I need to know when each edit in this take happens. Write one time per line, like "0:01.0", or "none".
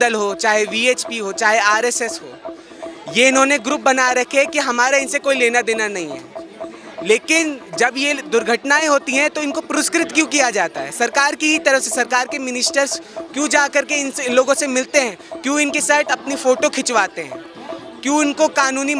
none